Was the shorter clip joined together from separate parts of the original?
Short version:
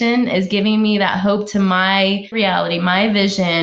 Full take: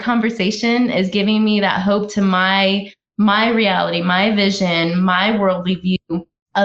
yes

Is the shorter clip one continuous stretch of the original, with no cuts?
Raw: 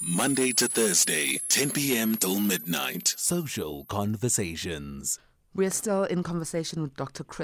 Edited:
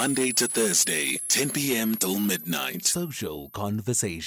no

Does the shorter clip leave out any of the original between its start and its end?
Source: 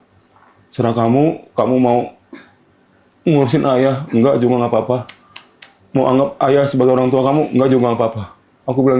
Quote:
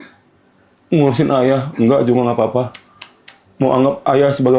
no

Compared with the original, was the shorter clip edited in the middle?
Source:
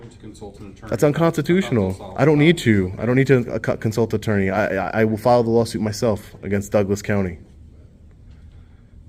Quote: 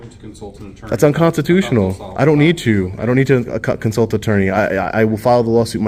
no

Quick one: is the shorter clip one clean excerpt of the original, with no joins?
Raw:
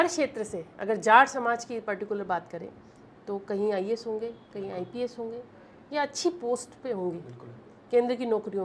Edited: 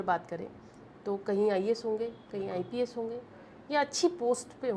yes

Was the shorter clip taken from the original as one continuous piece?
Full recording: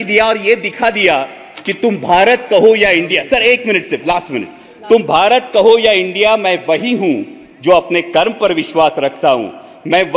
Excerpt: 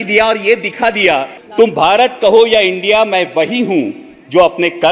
no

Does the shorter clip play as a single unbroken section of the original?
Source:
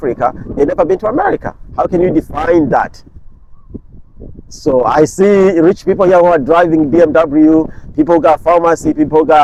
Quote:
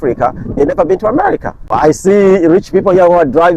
no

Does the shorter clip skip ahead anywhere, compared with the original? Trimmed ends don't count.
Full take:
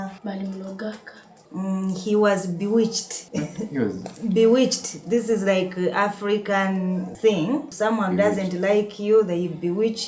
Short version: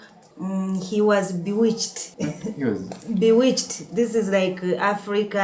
no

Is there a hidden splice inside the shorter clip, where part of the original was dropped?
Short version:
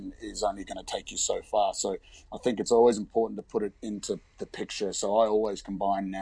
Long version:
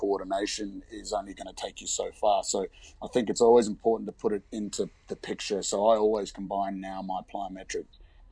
no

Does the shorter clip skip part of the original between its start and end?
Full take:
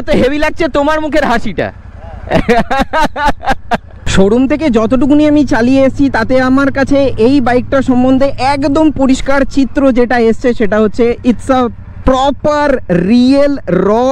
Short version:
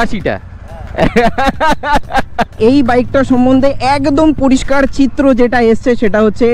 yes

